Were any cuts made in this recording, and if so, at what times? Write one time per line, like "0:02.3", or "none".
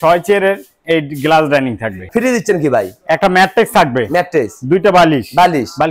0:02.1